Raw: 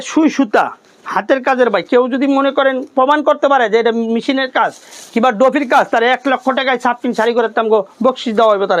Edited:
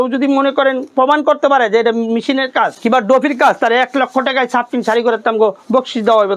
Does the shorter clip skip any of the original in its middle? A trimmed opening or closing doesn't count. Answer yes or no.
yes